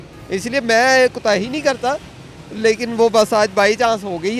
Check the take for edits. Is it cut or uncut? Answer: uncut